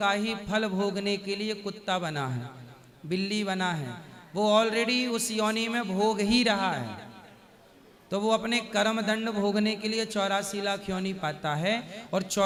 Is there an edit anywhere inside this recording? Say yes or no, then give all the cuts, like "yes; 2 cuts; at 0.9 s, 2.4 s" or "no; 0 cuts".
no; 0 cuts